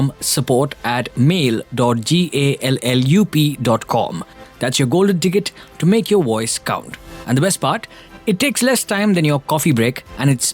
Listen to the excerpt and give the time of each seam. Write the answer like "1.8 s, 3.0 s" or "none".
none